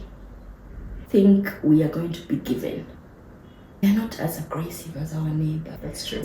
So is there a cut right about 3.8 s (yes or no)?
no